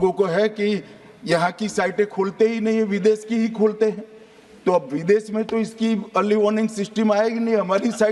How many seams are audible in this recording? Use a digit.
0